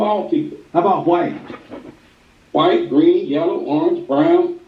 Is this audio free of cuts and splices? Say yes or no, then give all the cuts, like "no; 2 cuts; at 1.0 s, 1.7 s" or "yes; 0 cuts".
yes; 0 cuts